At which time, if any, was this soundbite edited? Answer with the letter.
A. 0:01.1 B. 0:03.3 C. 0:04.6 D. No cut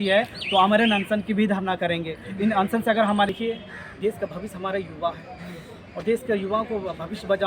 B